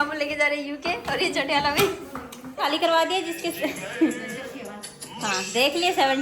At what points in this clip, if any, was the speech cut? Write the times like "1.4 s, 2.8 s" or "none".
2.7 s